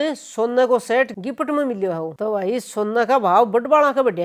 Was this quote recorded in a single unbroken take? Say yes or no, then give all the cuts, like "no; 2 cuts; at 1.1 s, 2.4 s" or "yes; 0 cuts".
yes; 0 cuts